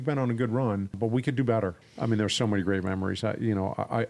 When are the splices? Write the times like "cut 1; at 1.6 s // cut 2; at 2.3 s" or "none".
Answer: cut 1; at 0.9 s // cut 2; at 1.8 s